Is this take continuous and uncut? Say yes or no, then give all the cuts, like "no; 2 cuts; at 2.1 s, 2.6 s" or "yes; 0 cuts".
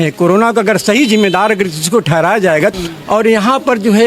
no; 1 cut; at 2.7 s